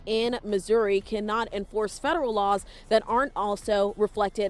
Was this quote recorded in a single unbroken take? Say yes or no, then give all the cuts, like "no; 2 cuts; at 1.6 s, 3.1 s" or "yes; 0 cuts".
yes; 0 cuts